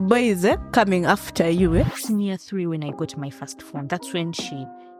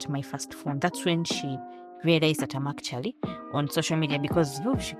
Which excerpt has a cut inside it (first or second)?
first